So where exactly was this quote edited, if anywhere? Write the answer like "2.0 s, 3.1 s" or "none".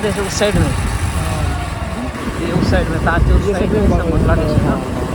2.2 s